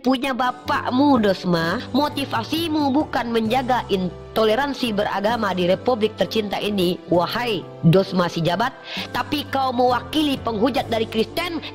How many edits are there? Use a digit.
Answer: 1